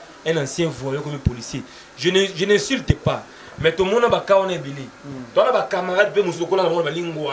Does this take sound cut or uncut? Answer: uncut